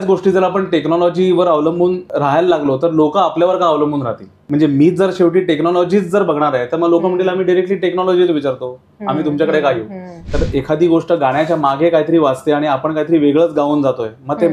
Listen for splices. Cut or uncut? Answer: cut